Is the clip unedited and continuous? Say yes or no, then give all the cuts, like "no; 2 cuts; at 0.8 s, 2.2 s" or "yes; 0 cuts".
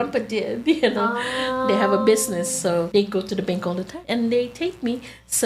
no; 2 cuts; at 2.9 s, 3.9 s